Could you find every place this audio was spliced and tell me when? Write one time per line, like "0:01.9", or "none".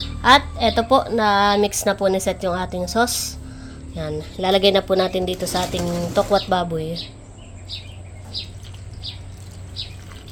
none